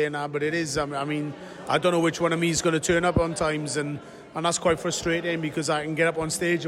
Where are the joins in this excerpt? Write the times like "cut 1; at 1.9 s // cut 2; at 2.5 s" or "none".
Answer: none

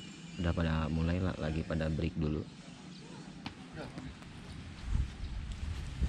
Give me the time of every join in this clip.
cut 1; at 3.4 s

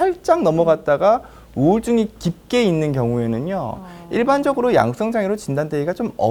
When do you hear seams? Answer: none

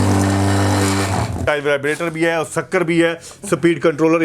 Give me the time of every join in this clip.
cut 1; at 1.4 s

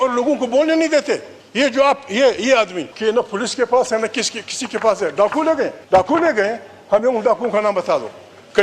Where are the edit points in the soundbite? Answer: cut 1; at 1.4 s // cut 2; at 2.9 s // cut 3; at 5.8 s

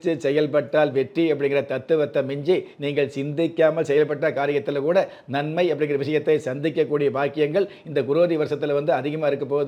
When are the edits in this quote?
none

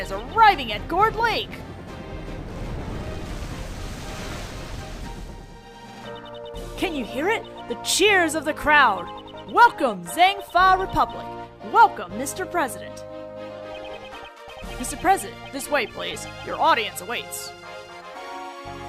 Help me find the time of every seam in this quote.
cut 1; at 15.5 s

